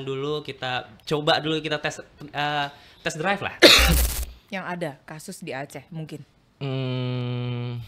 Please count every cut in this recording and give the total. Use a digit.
1